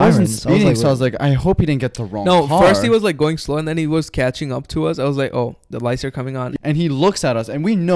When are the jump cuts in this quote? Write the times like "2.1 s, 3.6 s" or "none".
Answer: 6.5 s